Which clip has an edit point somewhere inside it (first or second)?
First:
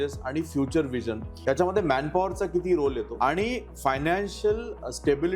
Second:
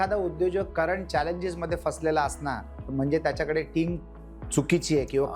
first